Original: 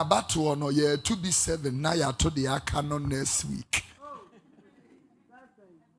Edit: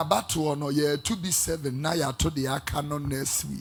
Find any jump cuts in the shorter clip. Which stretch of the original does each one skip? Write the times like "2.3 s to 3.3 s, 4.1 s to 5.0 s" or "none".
none